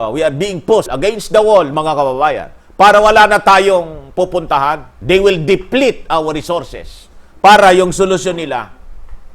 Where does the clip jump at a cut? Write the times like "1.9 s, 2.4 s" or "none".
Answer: 0.9 s, 4.8 s